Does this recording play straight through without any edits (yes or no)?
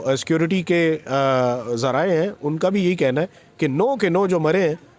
yes